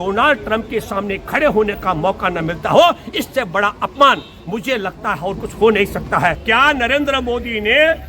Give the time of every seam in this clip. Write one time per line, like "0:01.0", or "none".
0:06.4